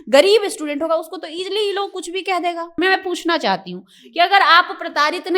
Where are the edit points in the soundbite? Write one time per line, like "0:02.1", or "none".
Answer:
0:02.7